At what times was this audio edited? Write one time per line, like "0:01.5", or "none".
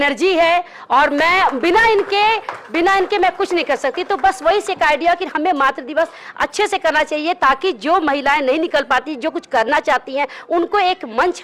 none